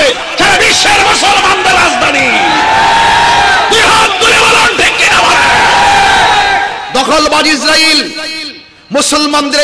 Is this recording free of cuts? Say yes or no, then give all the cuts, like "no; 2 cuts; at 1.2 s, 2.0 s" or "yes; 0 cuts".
no; 1 cut; at 6.8 s